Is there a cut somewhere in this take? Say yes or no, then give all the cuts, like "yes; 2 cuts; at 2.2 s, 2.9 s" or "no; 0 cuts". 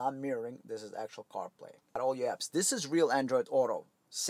yes; 1 cut; at 2.0 s